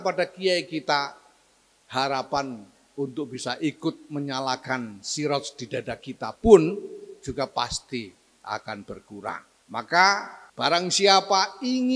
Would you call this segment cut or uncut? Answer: cut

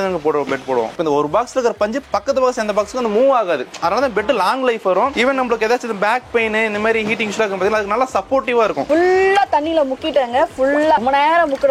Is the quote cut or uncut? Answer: cut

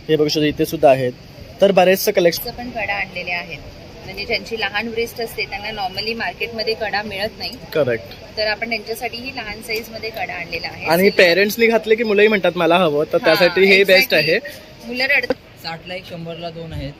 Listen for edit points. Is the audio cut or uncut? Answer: cut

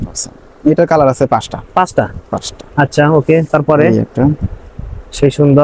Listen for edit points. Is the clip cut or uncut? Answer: uncut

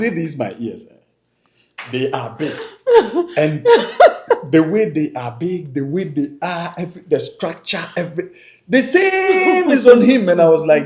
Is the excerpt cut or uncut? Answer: uncut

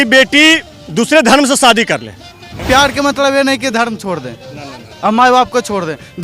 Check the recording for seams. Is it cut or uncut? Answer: cut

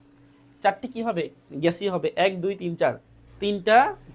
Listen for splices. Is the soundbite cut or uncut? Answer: cut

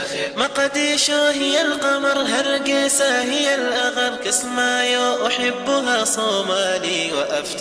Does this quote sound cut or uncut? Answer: uncut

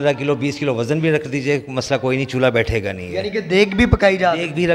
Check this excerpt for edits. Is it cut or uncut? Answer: uncut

